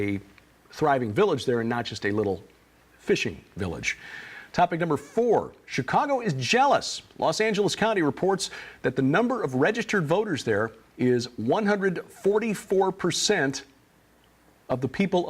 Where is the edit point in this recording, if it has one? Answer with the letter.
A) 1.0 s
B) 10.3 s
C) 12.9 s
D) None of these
B